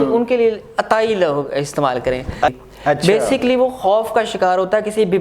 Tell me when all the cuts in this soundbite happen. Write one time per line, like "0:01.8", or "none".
0:02.5